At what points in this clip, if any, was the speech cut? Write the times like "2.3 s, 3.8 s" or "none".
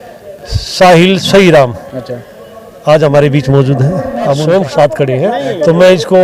4.4 s